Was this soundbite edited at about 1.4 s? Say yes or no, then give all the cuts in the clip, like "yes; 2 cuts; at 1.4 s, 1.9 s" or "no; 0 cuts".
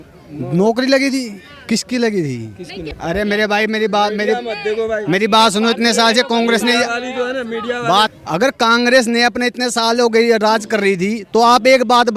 no; 2 cuts; at 2.9 s, 8.1 s